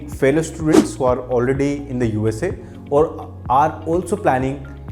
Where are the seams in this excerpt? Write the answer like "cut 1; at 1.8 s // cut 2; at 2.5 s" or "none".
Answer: none